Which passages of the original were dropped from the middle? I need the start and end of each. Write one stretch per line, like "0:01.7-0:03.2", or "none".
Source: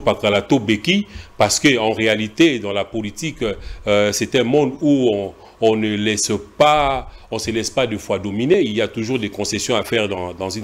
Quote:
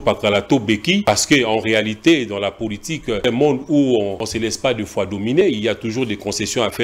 0:01.0-0:01.4
0:03.6-0:04.4
0:05.4-0:07.4